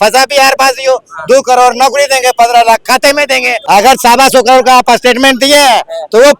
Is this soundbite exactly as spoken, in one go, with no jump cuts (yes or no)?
no